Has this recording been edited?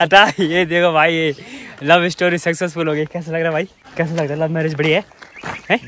yes; 1 cut; at 3.8 s

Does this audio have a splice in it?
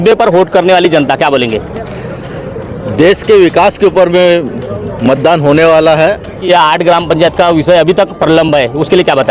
yes; 1 cut; at 6.4 s

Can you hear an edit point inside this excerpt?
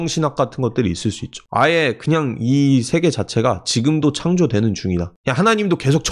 yes; 2 cuts; at 1.4 s, 5.2 s

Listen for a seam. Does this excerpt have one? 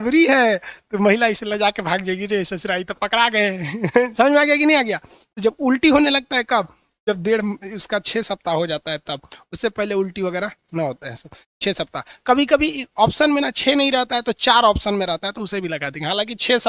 no; 0 cuts

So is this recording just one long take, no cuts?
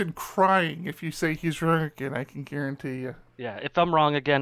no; 1 cut; at 3.3 s

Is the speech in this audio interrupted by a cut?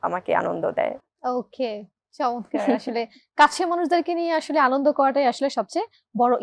no; 0 cuts

